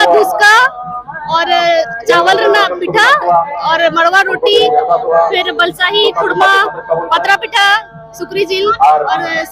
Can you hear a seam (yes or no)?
no